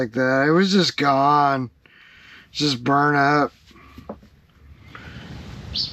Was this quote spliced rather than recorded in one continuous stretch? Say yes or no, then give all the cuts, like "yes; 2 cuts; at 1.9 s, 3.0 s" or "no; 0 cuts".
yes; 1 cut; at 5.0 s